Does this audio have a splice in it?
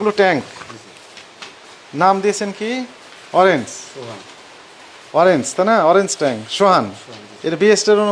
no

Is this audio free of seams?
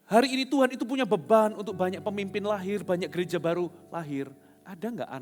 yes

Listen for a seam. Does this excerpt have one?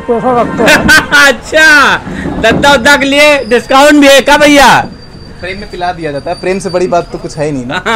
no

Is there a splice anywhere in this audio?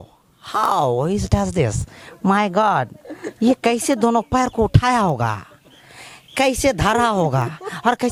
no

